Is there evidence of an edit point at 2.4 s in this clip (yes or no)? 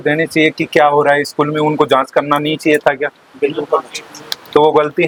no